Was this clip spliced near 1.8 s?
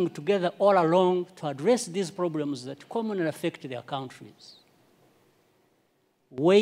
no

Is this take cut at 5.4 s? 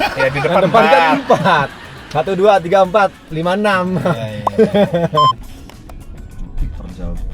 yes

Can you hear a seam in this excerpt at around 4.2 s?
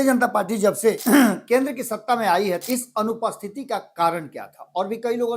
no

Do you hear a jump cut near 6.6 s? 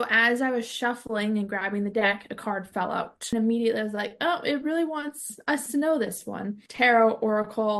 yes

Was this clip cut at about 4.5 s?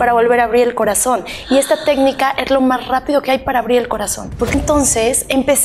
yes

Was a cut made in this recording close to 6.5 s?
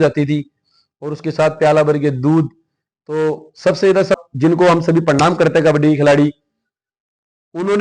no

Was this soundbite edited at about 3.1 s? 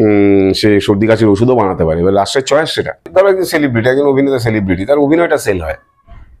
yes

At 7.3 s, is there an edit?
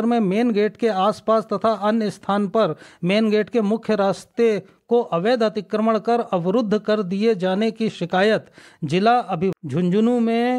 no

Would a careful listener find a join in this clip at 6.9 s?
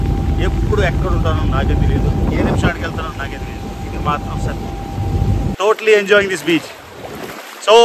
no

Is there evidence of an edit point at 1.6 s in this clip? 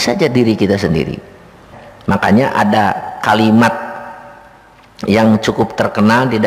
yes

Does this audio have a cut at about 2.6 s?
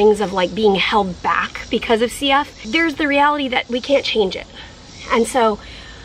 yes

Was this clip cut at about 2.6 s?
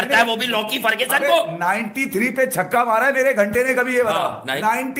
no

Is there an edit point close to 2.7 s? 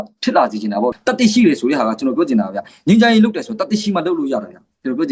no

